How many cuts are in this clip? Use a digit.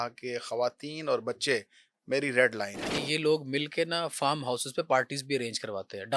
1